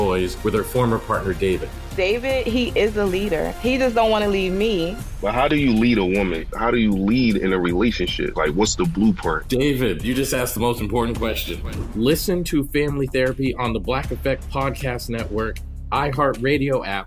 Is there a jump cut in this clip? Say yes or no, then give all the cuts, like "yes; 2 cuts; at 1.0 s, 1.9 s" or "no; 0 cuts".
no; 0 cuts